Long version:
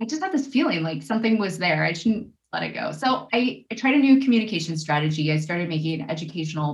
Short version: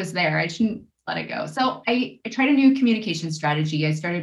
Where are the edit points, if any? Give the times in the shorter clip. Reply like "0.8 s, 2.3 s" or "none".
none